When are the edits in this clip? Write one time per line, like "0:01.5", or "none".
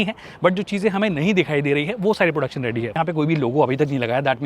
0:02.9